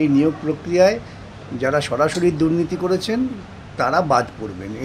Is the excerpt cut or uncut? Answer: uncut